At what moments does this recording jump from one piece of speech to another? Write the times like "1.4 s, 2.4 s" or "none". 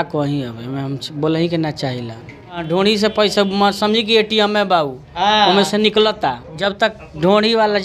2.6 s, 6.5 s